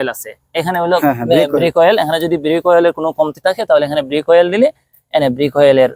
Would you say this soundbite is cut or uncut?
uncut